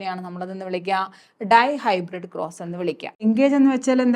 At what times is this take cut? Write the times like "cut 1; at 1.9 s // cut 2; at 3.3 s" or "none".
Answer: cut 1; at 3.2 s